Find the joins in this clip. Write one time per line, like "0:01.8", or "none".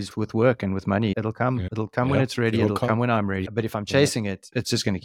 0:01.7
0:03.4

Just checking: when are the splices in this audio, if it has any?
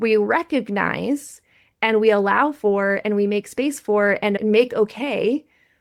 none

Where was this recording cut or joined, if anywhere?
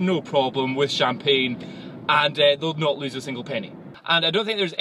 0:03.9

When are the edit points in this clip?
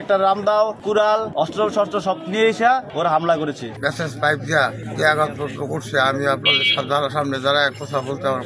0:01.0
0:02.9
0:03.8
0:04.8

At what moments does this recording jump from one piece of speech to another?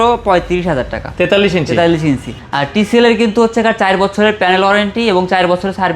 0:02.4

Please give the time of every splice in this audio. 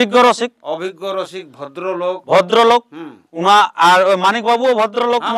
none

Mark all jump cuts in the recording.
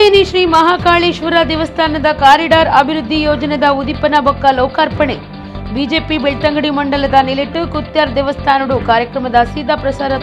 none

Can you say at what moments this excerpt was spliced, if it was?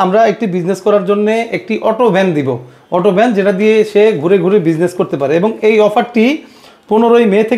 none

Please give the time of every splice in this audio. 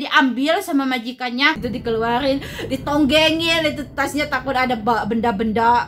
0:01.6

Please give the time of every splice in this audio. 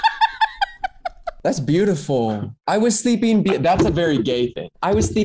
0:01.2
0:02.5

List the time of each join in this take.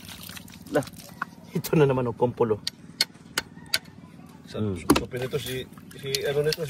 0:01.0

